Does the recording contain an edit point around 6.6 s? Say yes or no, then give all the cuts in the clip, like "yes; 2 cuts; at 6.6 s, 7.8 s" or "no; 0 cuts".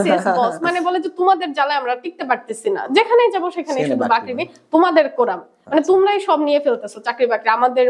no; 0 cuts